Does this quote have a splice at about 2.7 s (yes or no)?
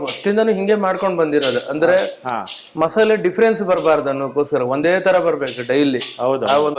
no